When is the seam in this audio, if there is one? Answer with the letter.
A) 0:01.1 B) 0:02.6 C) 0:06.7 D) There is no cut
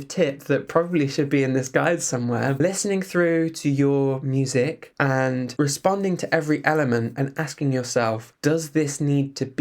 B